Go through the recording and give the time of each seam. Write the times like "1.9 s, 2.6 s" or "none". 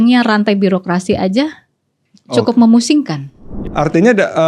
3.6 s